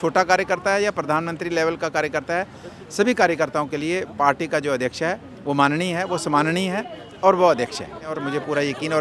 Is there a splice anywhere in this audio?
yes; 1 cut; at 8.1 s

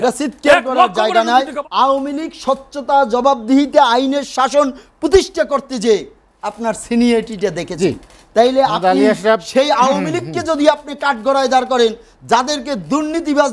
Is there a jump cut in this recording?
yes; 1 cut; at 1.6 s

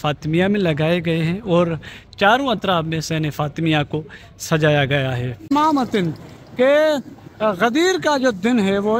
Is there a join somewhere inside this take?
yes; 1 cut; at 5.5 s

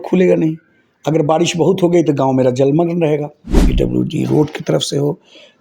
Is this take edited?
yes; 1 cut; at 3.7 s

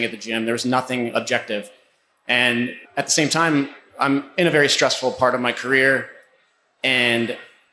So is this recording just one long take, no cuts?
no; 1 cut; at 2.8 s

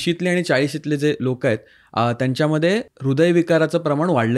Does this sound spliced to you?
yes; 1 cut; at 2.9 s

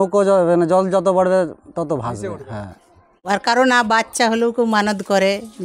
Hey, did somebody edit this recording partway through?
yes; 1 cut; at 3.1 s

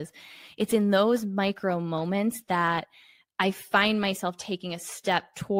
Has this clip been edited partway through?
no; 0 cuts

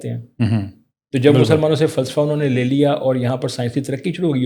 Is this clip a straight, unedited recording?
yes; 0 cuts

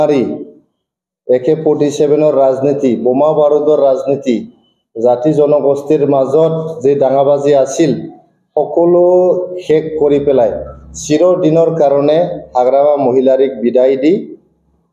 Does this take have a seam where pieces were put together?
no; 0 cuts

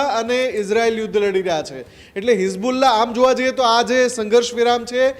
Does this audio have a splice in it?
no; 0 cuts

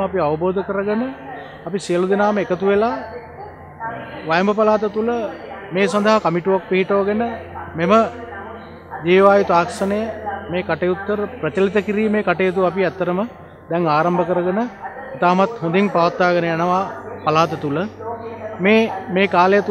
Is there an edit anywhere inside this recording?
no; 0 cuts

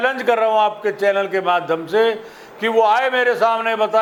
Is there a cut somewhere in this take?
no; 0 cuts

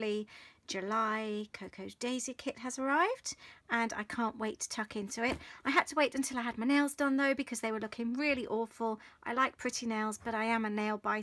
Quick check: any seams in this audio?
no; 0 cuts

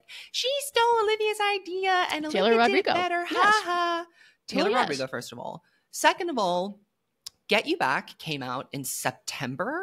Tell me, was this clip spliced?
no; 0 cuts

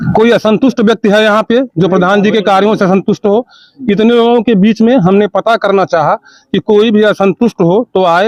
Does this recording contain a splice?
no; 0 cuts

